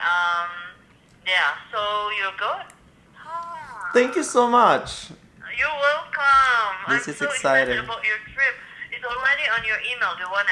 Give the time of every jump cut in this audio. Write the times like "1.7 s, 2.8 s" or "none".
none

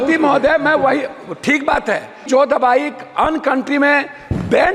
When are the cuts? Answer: 2.2 s

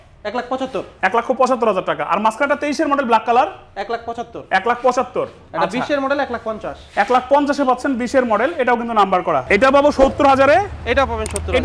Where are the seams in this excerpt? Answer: 9.4 s

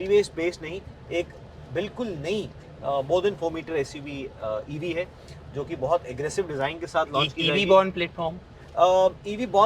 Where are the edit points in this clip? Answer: none

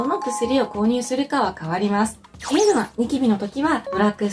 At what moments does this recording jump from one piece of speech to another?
2.4 s

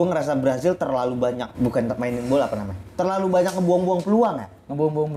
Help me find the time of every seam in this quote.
1.5 s

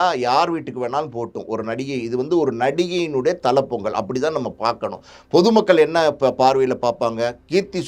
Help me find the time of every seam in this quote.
none

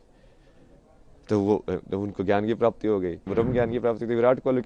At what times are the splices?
3.2 s

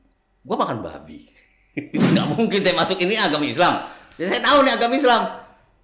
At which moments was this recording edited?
2.1 s

